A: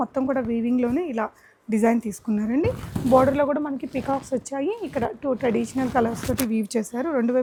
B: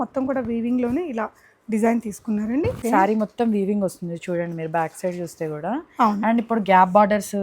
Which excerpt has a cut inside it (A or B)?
B